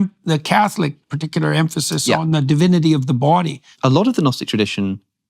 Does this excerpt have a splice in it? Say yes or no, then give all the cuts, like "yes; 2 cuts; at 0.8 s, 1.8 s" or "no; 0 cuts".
yes; 1 cut; at 3.7 s